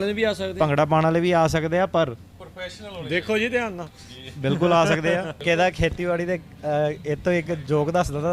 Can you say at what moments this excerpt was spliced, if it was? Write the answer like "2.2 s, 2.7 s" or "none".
5.4 s